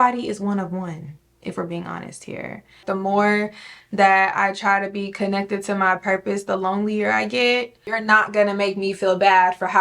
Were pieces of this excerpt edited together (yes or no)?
yes